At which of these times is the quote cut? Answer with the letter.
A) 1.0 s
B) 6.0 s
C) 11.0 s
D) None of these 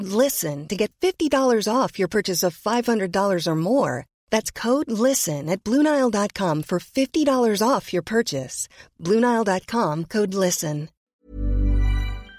C